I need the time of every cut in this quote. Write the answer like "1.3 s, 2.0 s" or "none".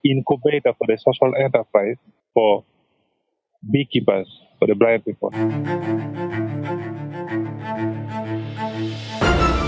5.3 s